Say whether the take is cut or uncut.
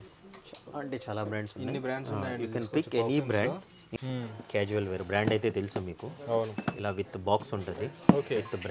cut